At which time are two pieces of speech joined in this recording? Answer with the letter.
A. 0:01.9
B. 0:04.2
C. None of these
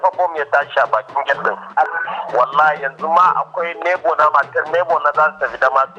A